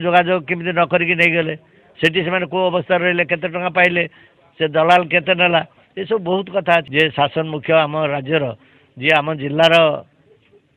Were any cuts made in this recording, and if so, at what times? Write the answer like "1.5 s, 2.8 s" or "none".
6.9 s